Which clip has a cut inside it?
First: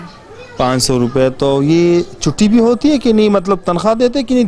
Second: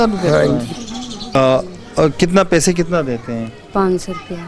second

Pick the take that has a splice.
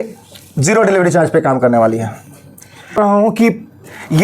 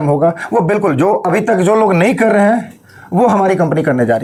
first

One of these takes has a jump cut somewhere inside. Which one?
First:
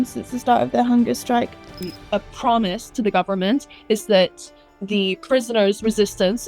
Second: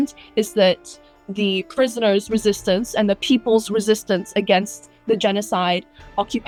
first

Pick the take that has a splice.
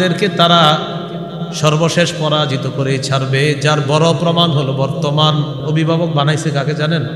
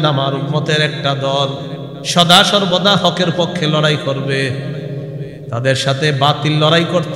first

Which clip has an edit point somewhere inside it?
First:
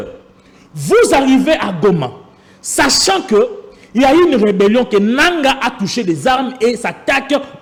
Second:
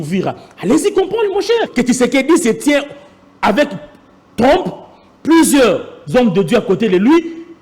second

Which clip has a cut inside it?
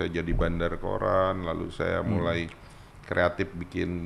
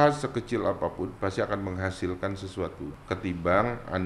second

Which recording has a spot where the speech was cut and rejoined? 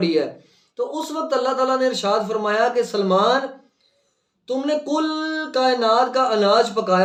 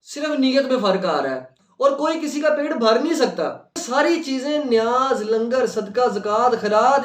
second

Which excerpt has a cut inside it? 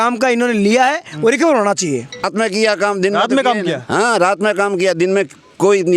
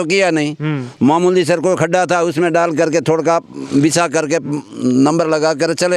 first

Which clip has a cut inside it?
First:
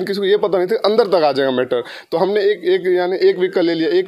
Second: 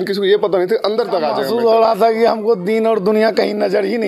second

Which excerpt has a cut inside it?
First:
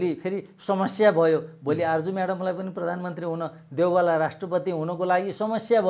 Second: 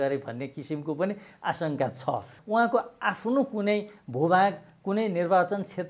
second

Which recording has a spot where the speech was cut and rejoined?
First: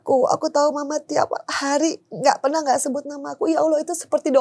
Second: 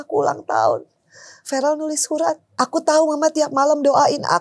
second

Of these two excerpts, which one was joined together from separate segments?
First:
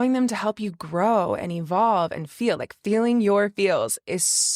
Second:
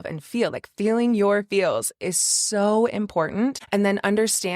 second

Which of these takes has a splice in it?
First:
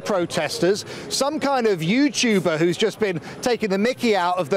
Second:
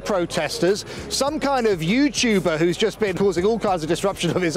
second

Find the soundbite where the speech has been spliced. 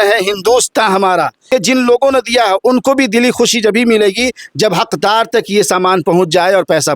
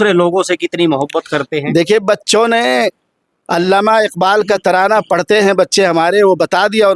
first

